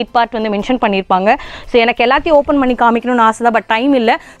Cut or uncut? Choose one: uncut